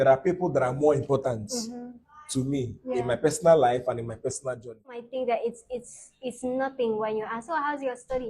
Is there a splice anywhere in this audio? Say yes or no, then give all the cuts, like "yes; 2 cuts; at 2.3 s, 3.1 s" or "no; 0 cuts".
yes; 1 cut; at 5.1 s